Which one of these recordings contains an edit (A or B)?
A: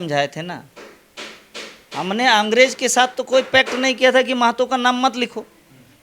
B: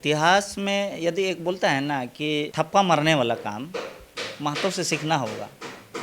B